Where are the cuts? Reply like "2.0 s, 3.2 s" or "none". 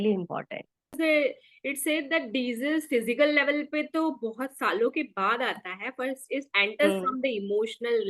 0.9 s